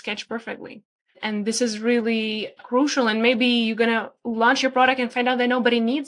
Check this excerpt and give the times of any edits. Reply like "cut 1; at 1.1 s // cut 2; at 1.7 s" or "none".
cut 1; at 1.2 s // cut 2; at 2.6 s